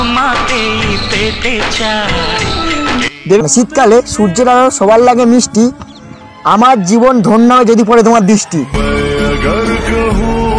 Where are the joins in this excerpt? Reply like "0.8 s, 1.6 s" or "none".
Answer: 3.4 s